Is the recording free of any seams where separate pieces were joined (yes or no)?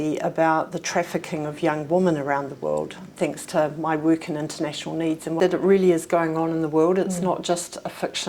no